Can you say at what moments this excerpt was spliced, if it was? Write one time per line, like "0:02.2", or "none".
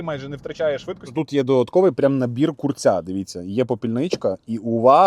0:01.0